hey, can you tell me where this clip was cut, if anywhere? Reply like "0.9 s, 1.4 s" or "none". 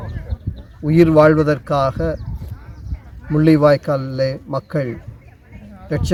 none

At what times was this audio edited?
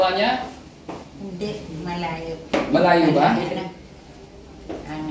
none

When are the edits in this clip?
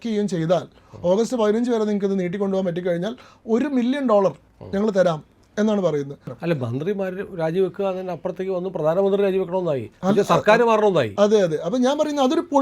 6.4 s

